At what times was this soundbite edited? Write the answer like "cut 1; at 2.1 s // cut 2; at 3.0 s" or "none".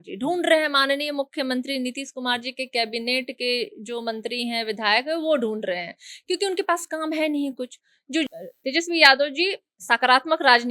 cut 1; at 8.3 s